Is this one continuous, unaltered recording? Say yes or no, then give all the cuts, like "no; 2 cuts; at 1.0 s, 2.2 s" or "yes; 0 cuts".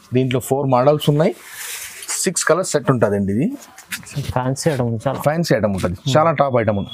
yes; 0 cuts